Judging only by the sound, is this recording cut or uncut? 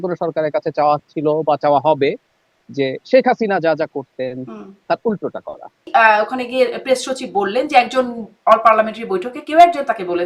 cut